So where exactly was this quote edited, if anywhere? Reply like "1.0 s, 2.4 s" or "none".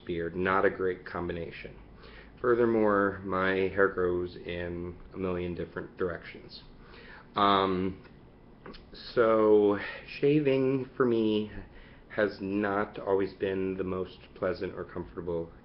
9.4 s